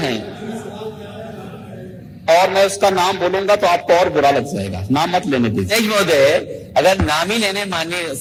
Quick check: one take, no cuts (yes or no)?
yes